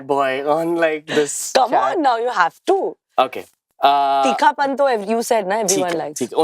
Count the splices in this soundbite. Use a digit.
0